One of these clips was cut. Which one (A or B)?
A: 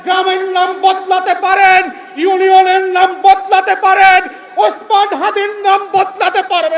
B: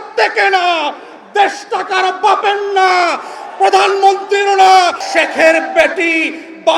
B